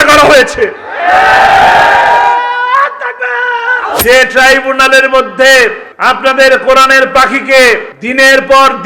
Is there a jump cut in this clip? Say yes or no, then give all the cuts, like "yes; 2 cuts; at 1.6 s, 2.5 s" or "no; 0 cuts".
yes; 3 cuts; at 4.0 s, 5.9 s, 8.0 s